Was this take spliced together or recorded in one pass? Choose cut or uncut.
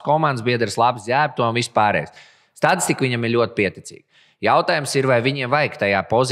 uncut